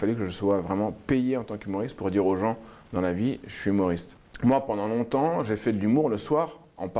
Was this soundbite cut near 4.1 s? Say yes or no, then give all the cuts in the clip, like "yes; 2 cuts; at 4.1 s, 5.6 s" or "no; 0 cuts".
yes; 1 cut; at 4.1 s